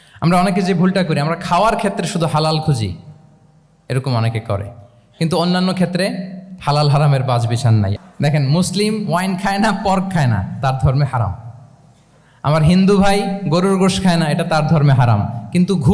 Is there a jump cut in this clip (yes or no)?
yes